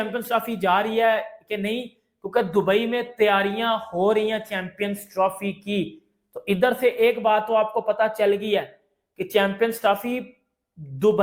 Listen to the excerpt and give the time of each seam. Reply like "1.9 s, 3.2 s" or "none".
none

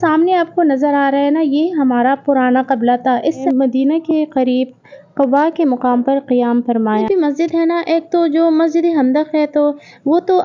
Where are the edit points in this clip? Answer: 3.4 s, 7.1 s

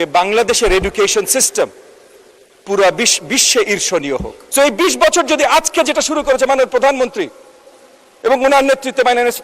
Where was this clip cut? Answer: 4.4 s

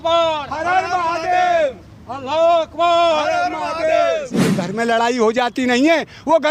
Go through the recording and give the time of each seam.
4.6 s

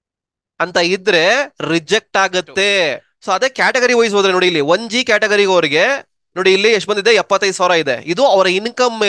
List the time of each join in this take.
3.1 s

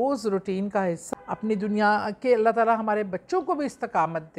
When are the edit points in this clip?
1.0 s

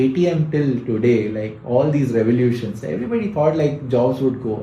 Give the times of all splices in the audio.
none

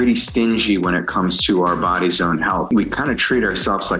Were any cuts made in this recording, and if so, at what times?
2.7 s

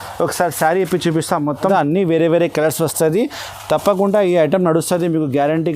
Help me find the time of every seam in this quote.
1.6 s

